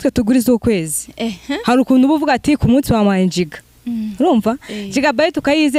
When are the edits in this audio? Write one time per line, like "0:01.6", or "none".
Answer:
none